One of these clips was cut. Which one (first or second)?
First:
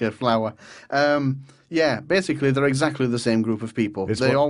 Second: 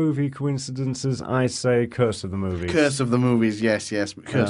second